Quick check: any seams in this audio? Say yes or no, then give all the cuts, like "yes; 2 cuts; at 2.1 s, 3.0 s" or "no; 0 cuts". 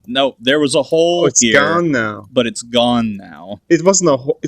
yes; 1 cut; at 3.5 s